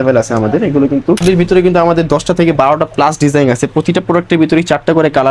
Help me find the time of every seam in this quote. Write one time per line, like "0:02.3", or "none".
0:01.2